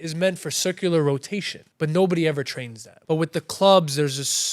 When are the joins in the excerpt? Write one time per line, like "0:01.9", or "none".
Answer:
0:01.6
0:02.9